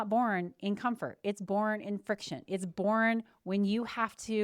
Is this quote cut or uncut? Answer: uncut